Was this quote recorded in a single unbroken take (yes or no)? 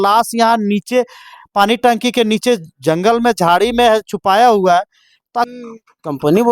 no